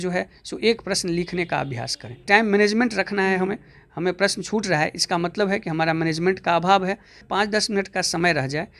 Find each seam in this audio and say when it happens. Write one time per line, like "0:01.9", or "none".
0:02.2
0:07.3